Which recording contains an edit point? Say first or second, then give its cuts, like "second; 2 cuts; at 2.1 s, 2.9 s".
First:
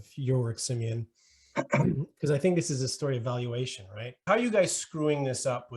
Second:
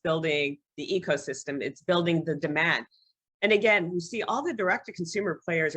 first; 1 cut; at 4.3 s